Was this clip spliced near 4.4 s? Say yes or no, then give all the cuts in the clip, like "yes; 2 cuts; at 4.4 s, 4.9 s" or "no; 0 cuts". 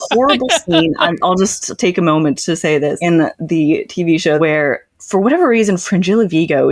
yes; 2 cuts; at 2.8 s, 4.4 s